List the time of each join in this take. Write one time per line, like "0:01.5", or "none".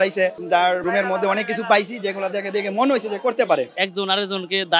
0:00.8
0:03.7